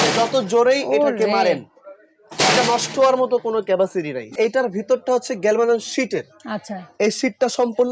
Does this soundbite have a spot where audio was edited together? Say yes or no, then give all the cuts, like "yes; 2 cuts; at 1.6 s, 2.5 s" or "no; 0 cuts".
yes; 1 cut; at 4.4 s